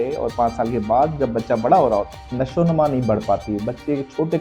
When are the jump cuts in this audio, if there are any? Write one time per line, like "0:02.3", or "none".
0:02.1